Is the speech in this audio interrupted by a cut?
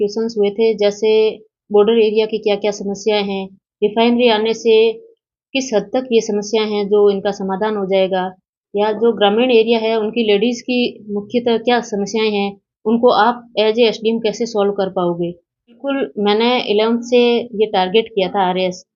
yes; 1 cut; at 15.8 s

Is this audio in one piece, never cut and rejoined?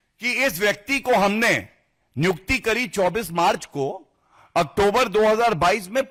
yes; 0 cuts

